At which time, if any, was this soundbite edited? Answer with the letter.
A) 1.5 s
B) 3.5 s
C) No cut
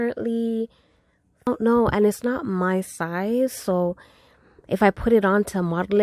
A